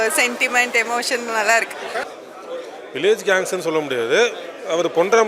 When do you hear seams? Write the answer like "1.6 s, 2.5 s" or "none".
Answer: 2.1 s

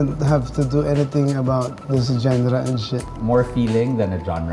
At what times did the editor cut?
3.1 s

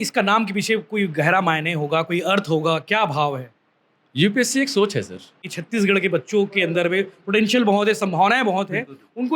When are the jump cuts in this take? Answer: 5.5 s

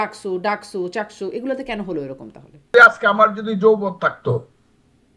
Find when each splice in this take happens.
2.7 s

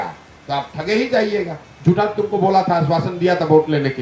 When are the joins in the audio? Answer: 1.7 s

